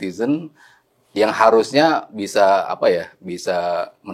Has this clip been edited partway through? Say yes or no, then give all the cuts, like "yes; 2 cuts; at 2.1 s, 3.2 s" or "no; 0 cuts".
no; 0 cuts